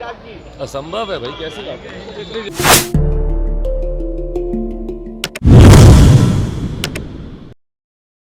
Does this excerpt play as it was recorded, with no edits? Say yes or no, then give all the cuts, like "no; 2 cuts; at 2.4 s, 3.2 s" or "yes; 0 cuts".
yes; 0 cuts